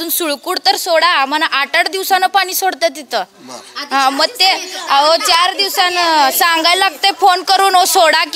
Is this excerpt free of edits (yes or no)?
yes